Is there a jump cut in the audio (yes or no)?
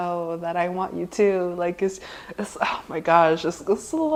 no